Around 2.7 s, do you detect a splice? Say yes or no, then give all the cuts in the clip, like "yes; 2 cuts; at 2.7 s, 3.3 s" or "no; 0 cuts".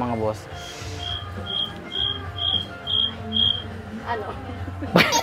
no; 0 cuts